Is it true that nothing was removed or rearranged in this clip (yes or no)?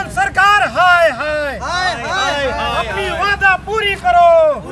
yes